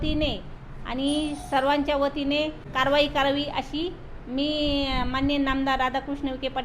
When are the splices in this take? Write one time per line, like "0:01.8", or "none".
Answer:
0:02.6